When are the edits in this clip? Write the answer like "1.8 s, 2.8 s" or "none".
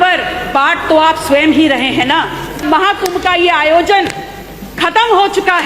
2.6 s